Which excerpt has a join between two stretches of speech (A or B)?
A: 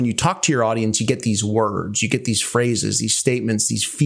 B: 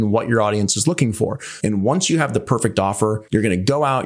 B